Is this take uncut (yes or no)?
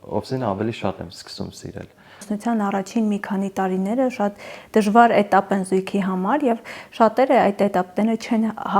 no